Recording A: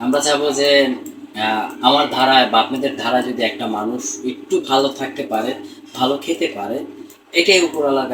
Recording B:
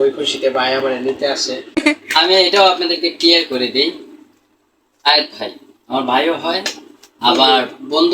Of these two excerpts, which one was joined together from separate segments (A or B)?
B